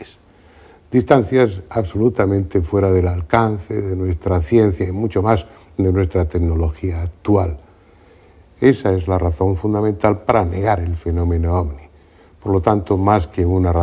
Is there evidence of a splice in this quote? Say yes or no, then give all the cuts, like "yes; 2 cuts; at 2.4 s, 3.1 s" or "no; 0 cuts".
yes; 1 cut; at 2.2 s